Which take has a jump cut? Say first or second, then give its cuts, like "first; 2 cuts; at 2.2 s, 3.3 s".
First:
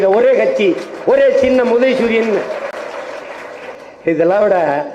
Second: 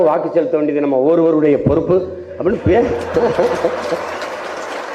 first; 1 cut; at 3.7 s